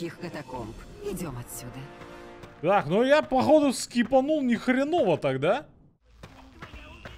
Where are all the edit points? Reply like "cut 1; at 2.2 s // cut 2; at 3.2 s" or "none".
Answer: cut 1; at 6.0 s